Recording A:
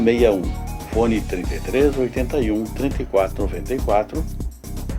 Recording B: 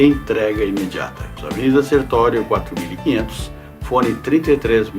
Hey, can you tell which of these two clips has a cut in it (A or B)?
B